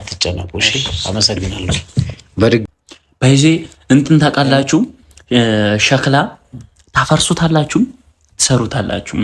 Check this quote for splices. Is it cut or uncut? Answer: cut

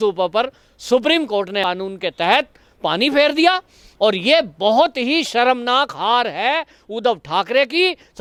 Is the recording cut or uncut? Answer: uncut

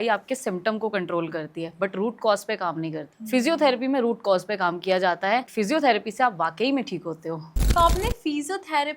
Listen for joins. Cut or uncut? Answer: cut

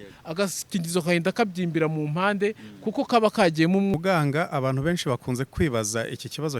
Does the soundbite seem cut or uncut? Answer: cut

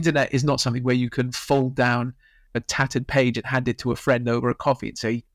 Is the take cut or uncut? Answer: uncut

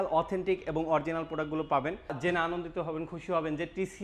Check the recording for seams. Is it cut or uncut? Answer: cut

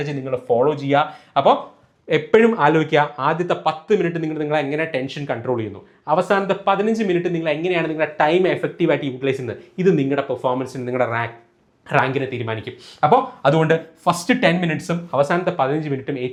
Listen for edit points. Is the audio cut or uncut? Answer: uncut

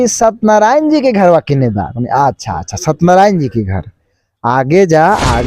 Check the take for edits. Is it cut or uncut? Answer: uncut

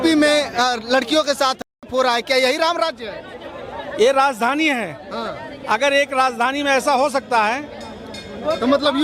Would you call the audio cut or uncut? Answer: uncut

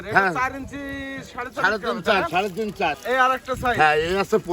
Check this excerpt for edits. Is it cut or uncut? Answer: cut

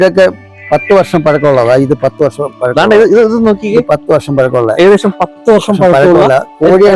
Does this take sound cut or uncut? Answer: uncut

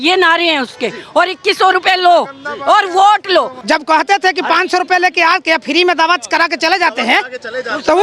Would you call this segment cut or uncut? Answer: cut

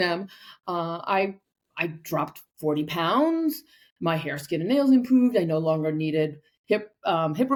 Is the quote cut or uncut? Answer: uncut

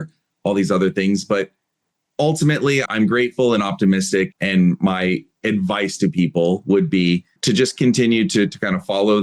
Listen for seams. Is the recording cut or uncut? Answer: cut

